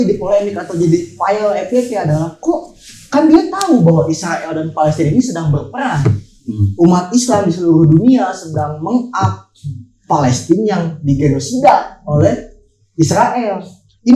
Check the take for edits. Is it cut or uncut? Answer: uncut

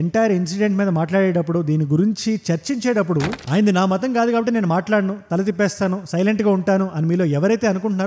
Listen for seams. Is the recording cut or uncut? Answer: cut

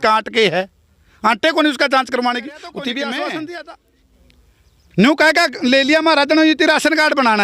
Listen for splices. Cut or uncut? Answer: cut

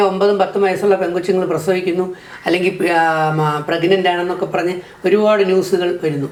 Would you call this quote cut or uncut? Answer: uncut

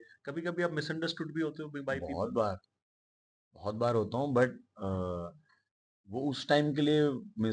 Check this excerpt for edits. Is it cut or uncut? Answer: uncut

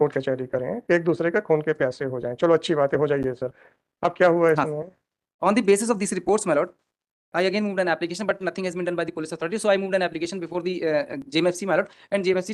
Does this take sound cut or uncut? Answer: uncut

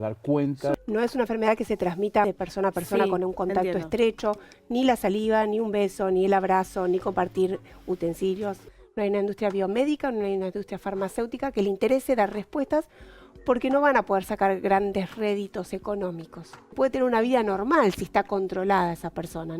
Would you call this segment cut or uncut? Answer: cut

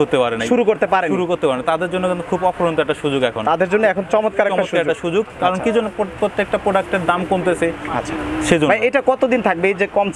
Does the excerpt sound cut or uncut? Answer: uncut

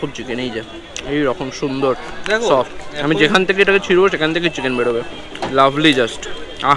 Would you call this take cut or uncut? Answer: uncut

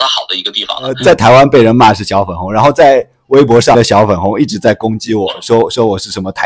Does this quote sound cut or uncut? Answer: cut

